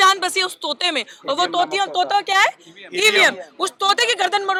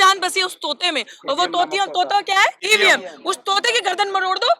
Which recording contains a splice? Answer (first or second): second